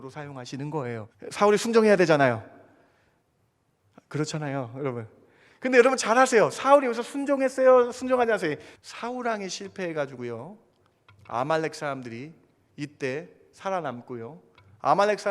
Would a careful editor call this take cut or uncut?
cut